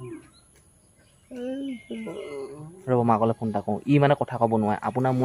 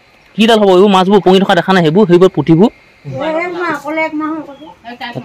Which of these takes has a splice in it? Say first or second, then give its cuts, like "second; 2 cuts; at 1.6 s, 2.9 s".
second; 1 cut; at 3.0 s